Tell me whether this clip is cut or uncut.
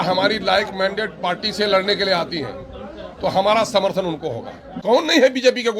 cut